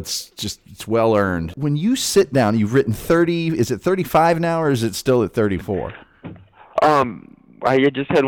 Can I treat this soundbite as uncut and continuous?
no; 1 cut; at 1.5 s

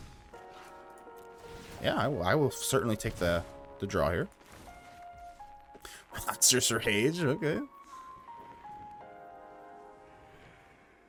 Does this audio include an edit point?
no; 0 cuts

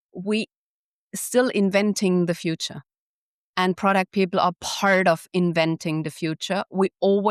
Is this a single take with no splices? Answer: yes; 0 cuts

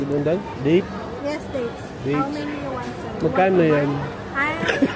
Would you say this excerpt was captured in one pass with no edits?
yes; 0 cuts

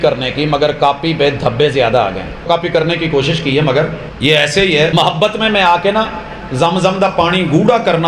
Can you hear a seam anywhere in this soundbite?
yes; 3 cuts; at 2.5 s, 4.0 s, 4.9 s

